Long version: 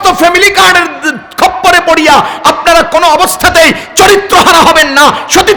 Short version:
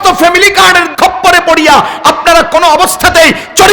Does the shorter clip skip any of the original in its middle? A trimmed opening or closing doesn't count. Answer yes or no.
yes